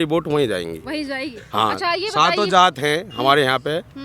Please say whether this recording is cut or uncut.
uncut